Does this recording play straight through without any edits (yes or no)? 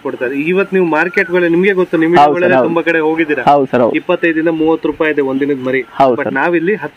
yes